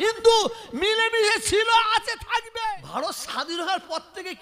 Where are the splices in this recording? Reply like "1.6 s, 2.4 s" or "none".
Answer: 2.8 s